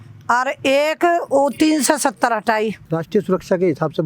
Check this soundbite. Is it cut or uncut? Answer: cut